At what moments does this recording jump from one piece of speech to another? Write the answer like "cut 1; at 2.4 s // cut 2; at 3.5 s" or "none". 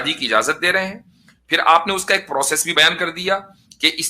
cut 1; at 2.7 s